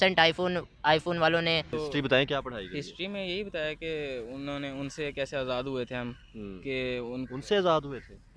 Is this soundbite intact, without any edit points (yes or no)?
no